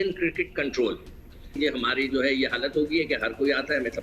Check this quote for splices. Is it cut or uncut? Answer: cut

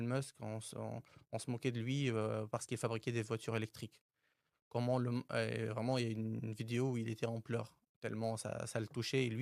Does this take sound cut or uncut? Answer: uncut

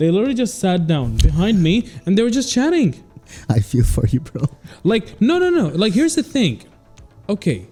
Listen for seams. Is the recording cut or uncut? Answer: uncut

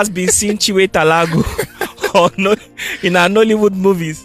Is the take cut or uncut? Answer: uncut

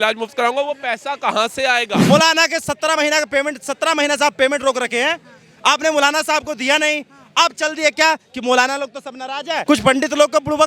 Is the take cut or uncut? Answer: cut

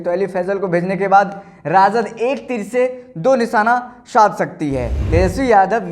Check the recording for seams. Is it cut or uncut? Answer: cut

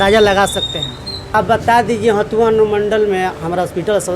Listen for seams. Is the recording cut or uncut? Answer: cut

